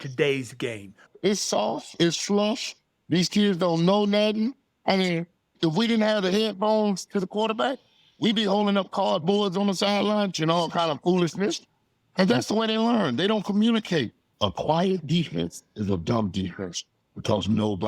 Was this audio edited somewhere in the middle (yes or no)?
yes